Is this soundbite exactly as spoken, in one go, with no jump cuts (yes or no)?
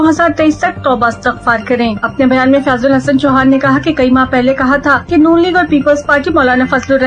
yes